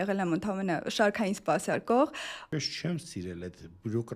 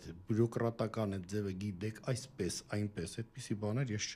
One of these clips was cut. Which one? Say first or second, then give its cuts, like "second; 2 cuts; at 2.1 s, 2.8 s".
first; 1 cut; at 2.5 s